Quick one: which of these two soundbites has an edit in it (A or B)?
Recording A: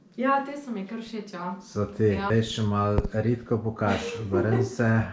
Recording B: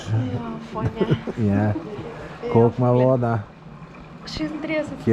A